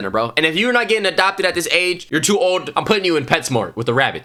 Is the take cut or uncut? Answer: uncut